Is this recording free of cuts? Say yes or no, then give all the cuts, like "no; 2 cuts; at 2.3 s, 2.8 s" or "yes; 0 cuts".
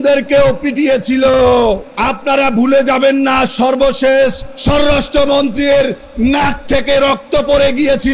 no; 2 cuts; at 1.9 s, 4.5 s